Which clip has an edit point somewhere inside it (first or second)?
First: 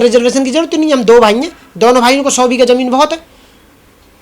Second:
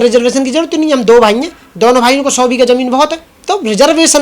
second